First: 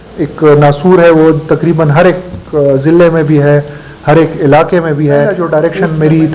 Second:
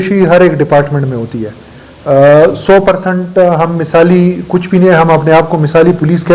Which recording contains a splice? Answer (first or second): first